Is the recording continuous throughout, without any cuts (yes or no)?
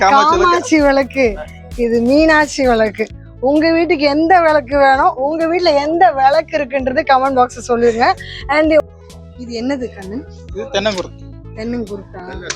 no